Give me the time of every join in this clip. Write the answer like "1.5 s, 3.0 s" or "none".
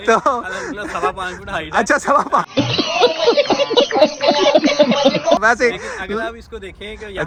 none